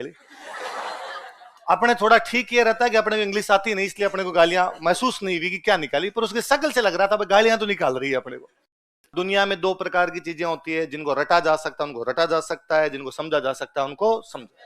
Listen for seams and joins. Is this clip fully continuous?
no; 1 cut; at 9.1 s

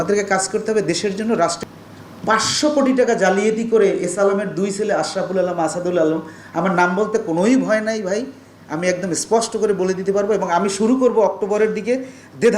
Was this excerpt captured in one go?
no; 1 cut; at 1.6 s

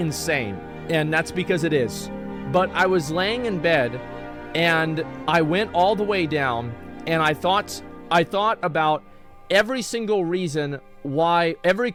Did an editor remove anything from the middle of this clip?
no; 0 cuts

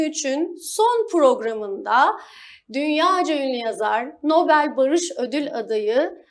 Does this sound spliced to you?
no; 0 cuts

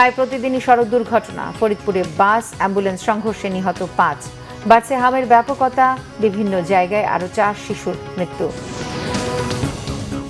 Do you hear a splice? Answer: yes; 1 cut; at 9.1 s

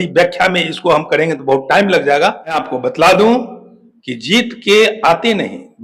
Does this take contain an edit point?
yes; 1 cut; at 2.6 s

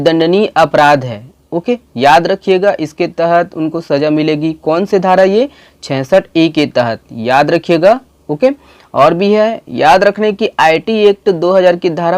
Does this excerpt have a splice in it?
no; 0 cuts

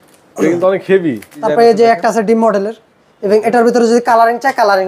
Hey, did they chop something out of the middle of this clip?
yes; 1 cut; at 1.3 s

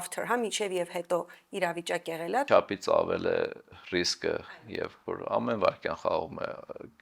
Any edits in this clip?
yes; 2 cuts; at 2.5 s, 3.7 s

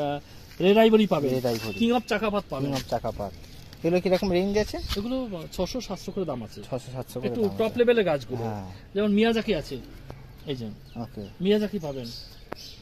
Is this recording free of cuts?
yes; 0 cuts

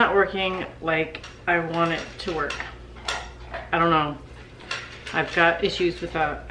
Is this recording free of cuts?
yes; 0 cuts

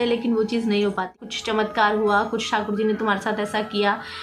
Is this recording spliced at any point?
yes; 1 cut; at 1.3 s

